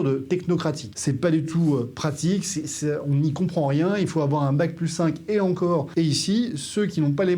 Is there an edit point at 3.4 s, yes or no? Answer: no